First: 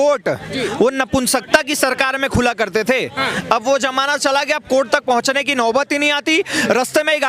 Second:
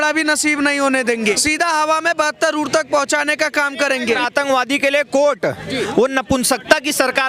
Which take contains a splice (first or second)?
second